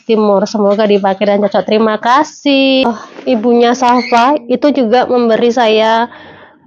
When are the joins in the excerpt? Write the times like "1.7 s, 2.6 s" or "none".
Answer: 2.8 s